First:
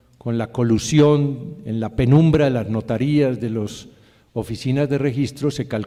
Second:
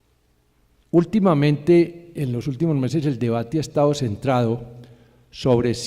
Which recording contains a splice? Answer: second; 1 cut; at 3.9 s

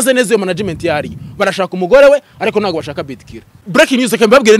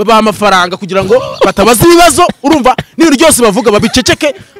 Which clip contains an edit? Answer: first; 1 cut; at 3.6 s

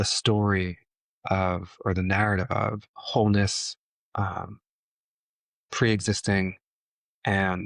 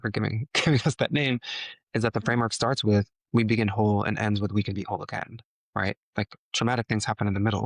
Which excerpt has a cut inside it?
first; 1 cut; at 2.9 s

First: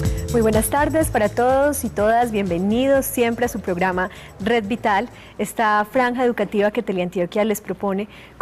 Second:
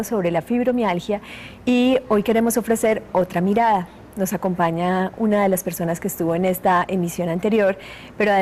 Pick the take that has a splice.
second; 1 cut; at 6.6 s

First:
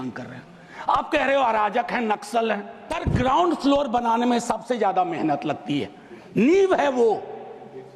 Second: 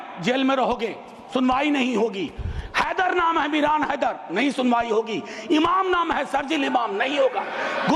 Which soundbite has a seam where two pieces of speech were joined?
first; 1 cut; at 2.8 s

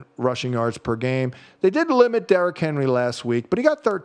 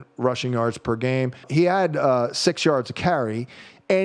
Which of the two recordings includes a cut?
second; 1 cut; at 1.4 s

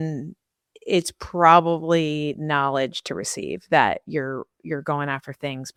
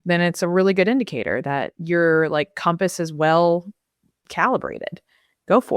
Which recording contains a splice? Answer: second; 1 cut; at 1.7 s

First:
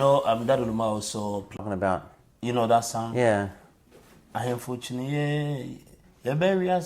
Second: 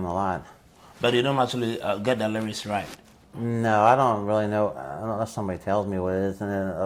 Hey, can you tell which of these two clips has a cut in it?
first; 1 cut; at 1.6 s

